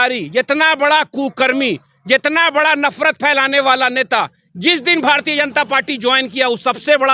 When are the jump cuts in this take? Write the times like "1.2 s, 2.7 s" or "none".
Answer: none